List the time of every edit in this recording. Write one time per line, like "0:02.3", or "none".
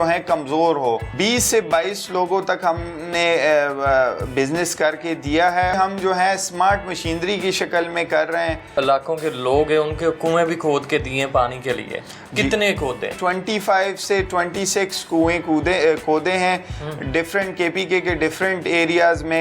0:01.1
0:05.7
0:08.8
0:13.2